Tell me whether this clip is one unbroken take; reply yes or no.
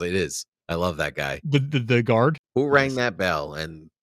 no